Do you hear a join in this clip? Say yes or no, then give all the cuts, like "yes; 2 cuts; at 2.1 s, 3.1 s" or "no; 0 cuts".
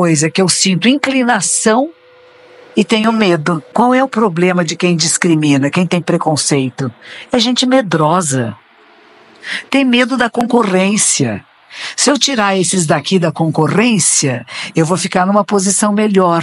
yes; 1 cut; at 3.6 s